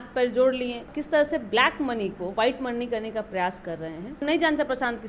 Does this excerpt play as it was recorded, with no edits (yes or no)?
no